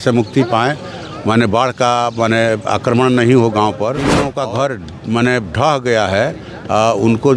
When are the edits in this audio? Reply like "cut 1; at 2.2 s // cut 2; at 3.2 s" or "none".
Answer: cut 1; at 4.2 s